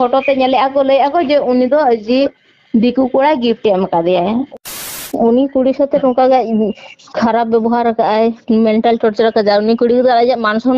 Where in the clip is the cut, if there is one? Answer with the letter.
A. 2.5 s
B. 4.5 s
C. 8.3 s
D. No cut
B